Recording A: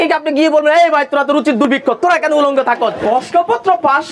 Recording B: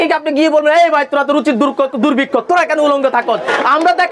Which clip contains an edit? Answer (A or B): A